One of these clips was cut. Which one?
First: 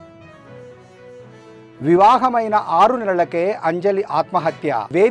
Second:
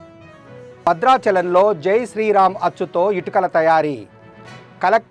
first; 2 cuts; at 0.7 s, 1.5 s

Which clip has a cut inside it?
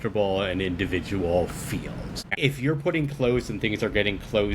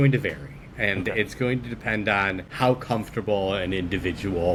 first; 1 cut; at 2.3 s

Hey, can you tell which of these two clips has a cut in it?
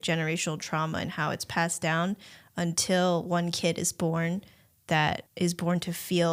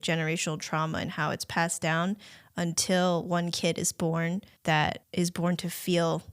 second; 1 cut; at 4.5 s

